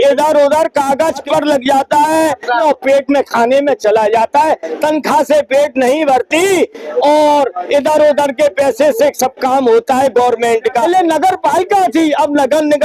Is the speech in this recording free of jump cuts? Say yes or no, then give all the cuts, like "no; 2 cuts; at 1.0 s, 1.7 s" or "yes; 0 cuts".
no; 3 cuts; at 1.2 s, 2.6 s, 10.8 s